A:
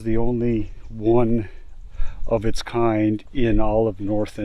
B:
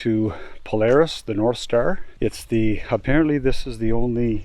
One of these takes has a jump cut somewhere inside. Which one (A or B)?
B